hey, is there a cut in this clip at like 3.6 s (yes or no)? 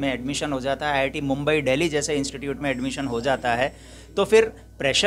no